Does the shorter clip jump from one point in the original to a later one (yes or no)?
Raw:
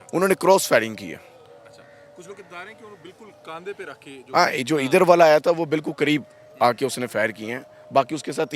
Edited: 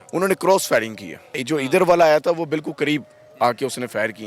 yes